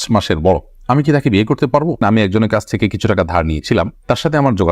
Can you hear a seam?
yes; 1 cut; at 2.0 s

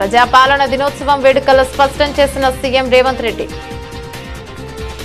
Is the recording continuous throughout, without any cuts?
no; 1 cut; at 3.5 s

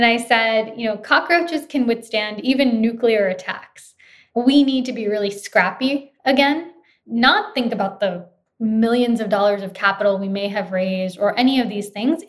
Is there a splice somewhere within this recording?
yes; 2 cuts; at 4.2 s, 6.9 s

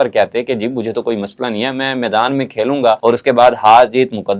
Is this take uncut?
no; 1 cut; at 3.0 s

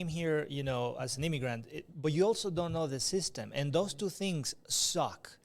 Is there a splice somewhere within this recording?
yes; 1 cut; at 1.5 s

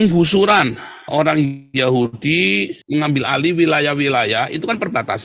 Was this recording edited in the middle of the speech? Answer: no; 0 cuts

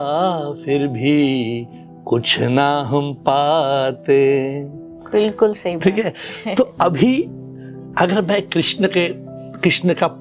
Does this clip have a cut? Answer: no; 0 cuts

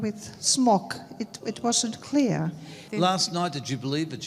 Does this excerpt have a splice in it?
yes; 1 cut; at 2.8 s

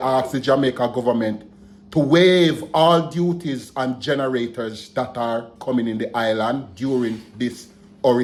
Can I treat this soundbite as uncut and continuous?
yes; 0 cuts

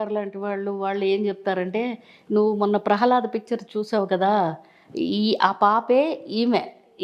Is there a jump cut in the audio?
no; 0 cuts

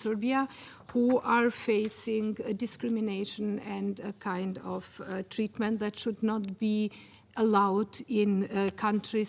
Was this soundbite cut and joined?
no; 0 cuts

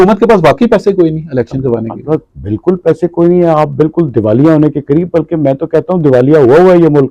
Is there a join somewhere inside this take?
no; 0 cuts

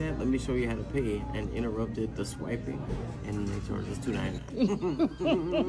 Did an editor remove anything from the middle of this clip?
no; 0 cuts

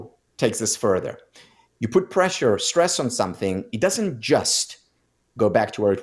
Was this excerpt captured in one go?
yes; 0 cuts

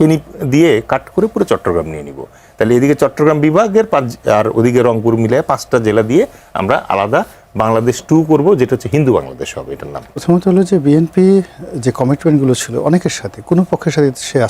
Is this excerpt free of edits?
no; 1 cut; at 10.1 s

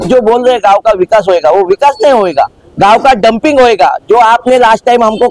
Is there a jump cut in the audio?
no; 0 cuts

